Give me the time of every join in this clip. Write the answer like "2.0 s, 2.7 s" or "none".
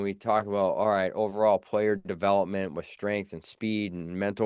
none